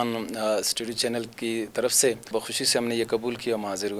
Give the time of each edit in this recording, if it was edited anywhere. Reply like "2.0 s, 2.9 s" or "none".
2.3 s